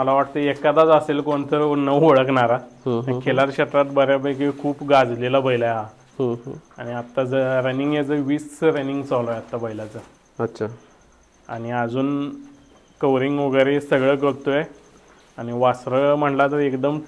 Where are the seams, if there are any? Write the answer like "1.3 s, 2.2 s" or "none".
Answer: none